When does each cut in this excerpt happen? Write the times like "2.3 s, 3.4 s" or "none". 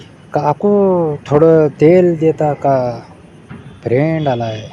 none